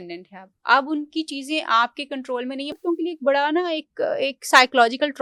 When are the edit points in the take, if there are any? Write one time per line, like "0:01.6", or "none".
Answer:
0:02.8